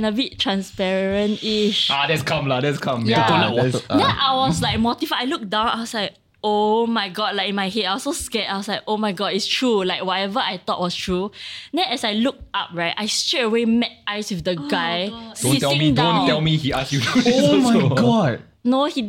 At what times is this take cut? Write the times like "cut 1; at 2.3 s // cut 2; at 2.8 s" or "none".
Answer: none